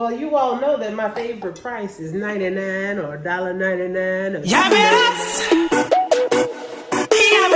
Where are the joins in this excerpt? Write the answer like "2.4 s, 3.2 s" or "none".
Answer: 4.4 s